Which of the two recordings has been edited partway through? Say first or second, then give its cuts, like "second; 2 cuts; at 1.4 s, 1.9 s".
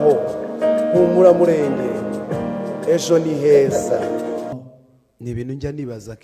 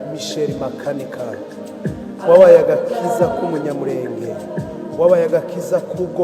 first; 1 cut; at 4.5 s